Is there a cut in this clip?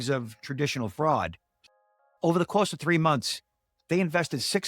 yes; 1 cut; at 1.5 s

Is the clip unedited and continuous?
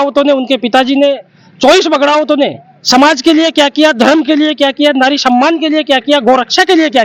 yes; 0 cuts

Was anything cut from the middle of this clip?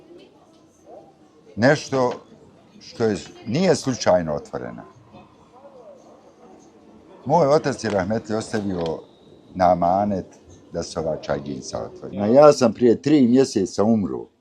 yes; 1 cut; at 12.2 s

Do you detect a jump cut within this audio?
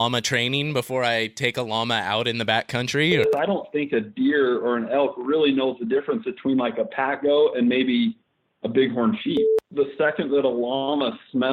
yes; 2 cuts; at 3.3 s, 9.6 s

